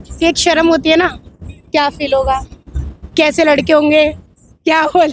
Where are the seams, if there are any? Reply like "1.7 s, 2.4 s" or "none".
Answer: none